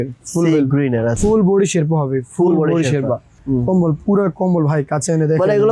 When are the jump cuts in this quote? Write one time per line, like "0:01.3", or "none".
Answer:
0:01.2
0:03.3